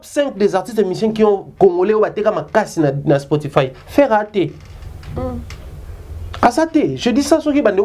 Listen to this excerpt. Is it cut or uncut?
uncut